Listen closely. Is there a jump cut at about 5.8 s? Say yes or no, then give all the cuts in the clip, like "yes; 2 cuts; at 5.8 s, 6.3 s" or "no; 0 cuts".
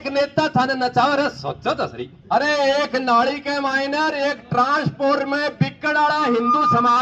no; 1 cut; at 2.2 s